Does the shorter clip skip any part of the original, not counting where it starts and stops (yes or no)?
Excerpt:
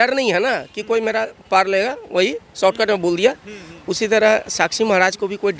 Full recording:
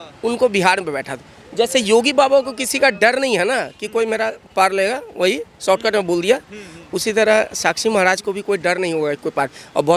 no